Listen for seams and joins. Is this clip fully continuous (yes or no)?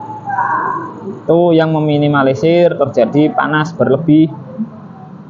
yes